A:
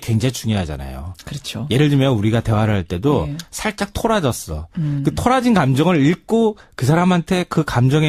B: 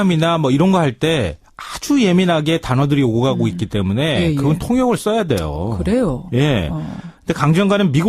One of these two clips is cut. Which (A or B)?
B